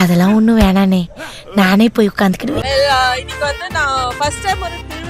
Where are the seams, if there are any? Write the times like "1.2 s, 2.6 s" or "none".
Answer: 2.6 s